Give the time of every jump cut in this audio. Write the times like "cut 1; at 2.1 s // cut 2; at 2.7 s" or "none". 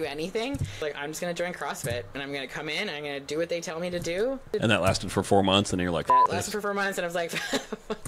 cut 1; at 0.8 s // cut 2; at 4.5 s